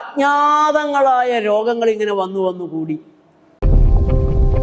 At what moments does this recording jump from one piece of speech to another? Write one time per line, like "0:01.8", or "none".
0:03.6